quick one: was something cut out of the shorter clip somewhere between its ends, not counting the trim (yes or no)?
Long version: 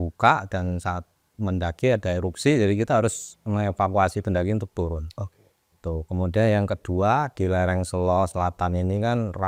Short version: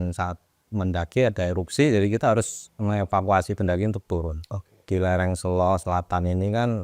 yes